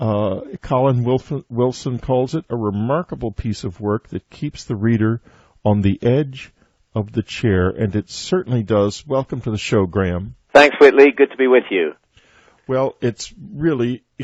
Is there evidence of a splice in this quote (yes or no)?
no